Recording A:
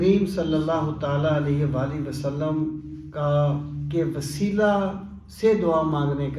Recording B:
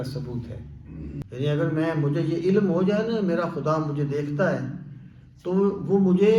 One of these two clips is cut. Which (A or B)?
B